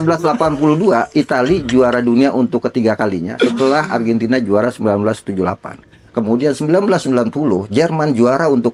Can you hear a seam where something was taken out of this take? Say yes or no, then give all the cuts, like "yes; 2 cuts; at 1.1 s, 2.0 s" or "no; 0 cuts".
no; 0 cuts